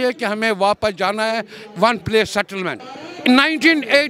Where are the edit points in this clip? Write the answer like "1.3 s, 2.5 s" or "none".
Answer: none